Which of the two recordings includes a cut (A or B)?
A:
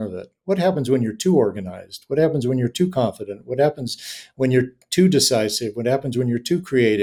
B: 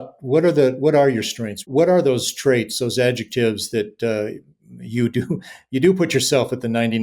B